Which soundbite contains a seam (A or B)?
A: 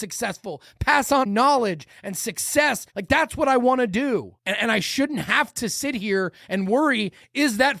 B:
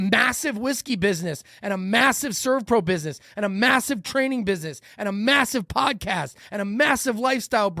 A